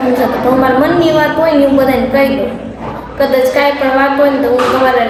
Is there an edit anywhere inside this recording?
no; 0 cuts

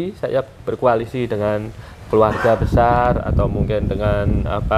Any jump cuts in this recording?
no; 0 cuts

